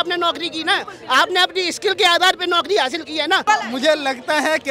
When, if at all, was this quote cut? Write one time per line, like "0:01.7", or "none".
0:03.4